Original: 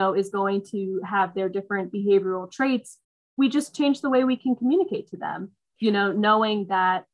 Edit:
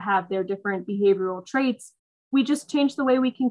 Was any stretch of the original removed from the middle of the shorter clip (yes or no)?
no